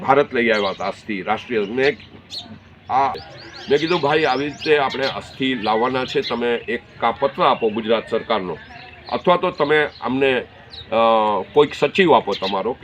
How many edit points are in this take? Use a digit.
1